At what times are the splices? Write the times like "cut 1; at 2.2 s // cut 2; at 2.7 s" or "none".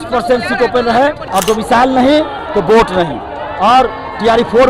cut 1; at 1.2 s